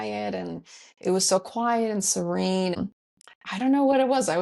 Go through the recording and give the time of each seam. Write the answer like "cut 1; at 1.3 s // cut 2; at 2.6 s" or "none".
cut 1; at 2.8 s